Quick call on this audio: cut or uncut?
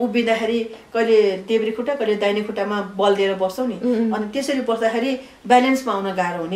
uncut